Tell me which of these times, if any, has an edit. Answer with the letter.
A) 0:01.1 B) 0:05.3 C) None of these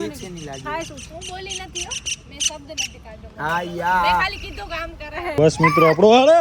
B